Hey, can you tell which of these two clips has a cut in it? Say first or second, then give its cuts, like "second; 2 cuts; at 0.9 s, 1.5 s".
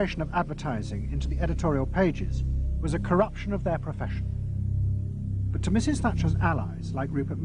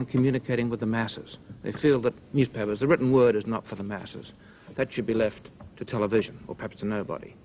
first; 1 cut; at 2.3 s